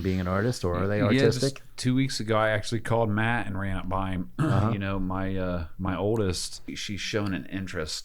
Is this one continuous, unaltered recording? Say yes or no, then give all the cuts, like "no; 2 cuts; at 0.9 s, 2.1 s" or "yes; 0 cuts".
no; 1 cut; at 6.7 s